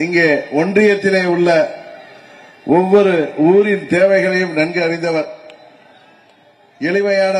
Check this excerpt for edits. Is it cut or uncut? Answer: cut